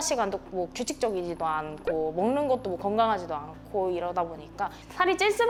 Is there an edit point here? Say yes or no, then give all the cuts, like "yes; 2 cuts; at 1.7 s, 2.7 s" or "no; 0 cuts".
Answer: no; 0 cuts